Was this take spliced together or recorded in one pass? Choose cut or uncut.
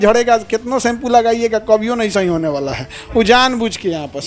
uncut